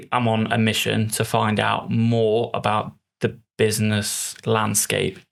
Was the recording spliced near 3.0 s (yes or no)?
no